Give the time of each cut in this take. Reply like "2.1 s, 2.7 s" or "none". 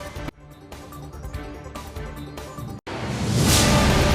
3.0 s

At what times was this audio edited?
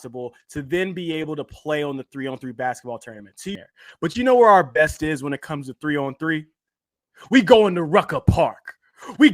3.5 s

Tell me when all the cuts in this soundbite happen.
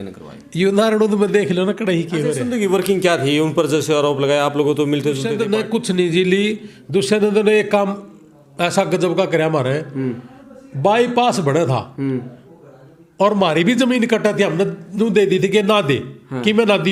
2.4 s, 5.3 s

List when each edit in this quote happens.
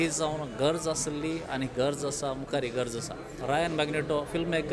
3.4 s

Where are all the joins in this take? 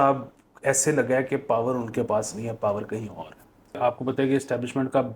3.7 s

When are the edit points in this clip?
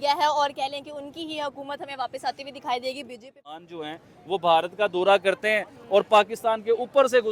3.7 s

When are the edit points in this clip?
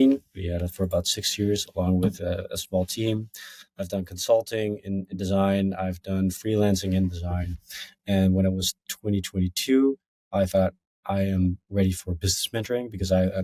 none

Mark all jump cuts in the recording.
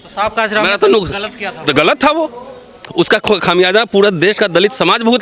none

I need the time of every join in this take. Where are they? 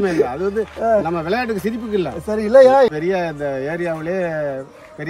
2.9 s

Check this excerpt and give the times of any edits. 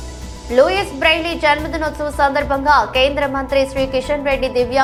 none

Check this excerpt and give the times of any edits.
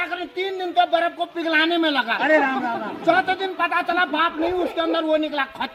none

